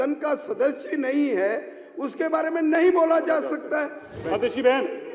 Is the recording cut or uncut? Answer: cut